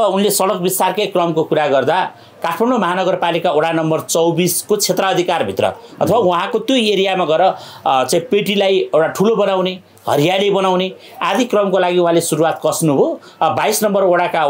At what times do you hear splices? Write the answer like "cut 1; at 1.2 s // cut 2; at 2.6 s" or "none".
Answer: none